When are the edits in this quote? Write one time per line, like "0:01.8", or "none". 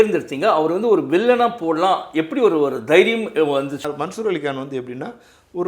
0:03.8